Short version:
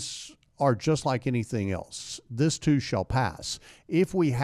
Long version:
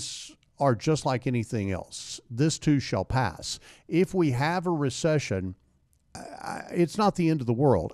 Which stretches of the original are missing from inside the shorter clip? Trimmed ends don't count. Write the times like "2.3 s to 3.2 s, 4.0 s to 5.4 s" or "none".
none

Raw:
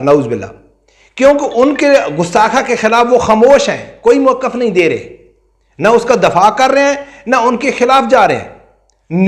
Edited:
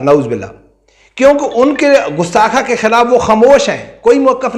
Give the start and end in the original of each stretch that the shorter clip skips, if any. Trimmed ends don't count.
none

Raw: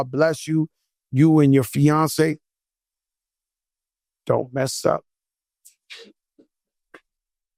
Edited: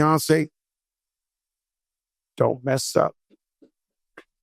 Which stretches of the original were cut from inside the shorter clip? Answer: 5.4 s to 6.2 s

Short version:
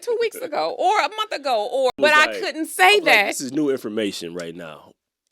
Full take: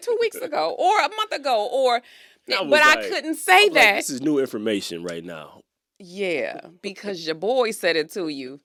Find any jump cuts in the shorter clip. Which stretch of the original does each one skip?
1.9 s to 2.6 s

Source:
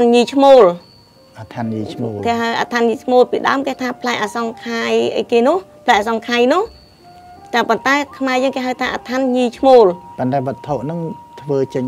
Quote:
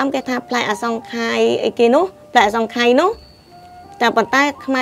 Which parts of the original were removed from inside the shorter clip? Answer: none

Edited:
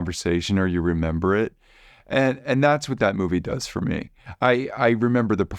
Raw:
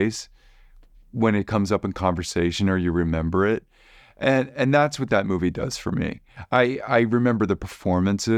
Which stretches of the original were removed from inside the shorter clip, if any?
none

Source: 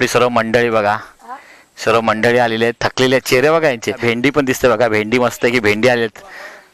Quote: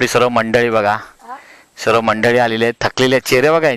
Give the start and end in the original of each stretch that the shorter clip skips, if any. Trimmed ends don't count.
none

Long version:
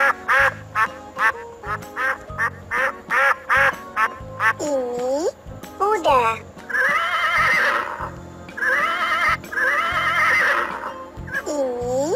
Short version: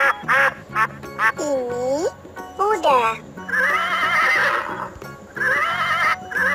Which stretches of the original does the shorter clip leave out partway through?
1.3 s to 4.5 s

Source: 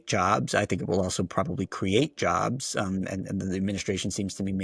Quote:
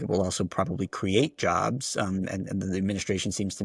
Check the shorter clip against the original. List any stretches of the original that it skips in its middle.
none

